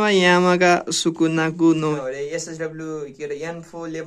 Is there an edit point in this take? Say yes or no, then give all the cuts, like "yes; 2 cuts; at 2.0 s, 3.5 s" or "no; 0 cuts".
yes; 1 cut; at 2.0 s